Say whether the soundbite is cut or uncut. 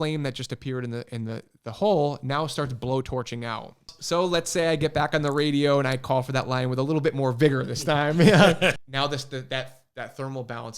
cut